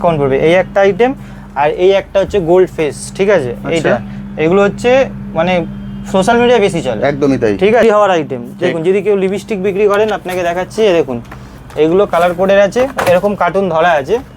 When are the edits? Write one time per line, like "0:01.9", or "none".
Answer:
0:07.8